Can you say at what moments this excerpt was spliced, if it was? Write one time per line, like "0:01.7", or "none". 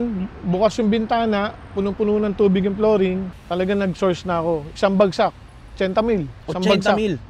0:03.3